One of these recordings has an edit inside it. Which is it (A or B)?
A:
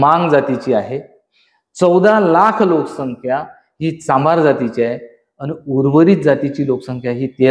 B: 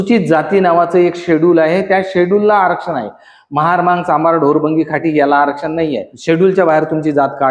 B